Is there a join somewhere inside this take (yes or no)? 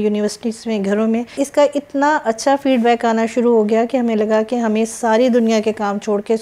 yes